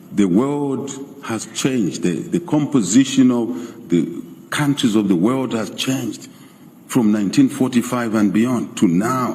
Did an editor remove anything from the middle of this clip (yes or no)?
no